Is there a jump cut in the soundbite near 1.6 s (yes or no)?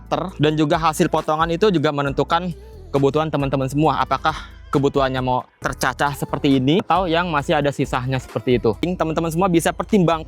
no